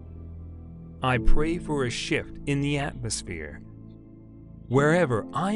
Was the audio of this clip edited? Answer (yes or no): yes